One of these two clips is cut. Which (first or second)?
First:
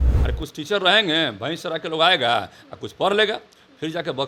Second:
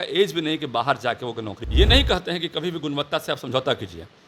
second